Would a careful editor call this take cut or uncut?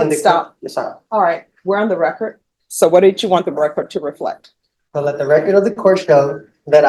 uncut